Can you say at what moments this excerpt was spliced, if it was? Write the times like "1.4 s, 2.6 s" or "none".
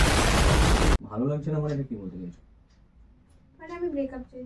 1.0 s